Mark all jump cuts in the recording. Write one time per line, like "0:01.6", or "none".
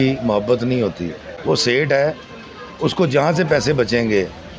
0:01.3